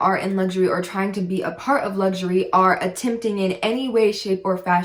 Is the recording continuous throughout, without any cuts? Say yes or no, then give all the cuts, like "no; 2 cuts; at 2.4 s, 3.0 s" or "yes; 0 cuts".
yes; 0 cuts